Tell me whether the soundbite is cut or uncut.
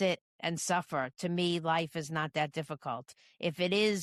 uncut